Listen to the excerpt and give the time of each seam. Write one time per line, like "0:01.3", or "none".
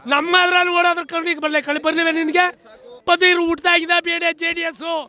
0:03.0